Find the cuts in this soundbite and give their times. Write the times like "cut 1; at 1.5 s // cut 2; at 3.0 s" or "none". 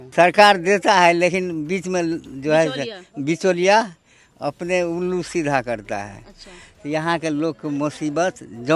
none

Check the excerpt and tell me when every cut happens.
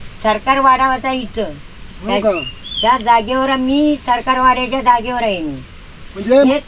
none

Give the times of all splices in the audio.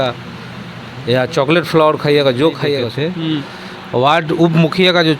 cut 1; at 2.9 s

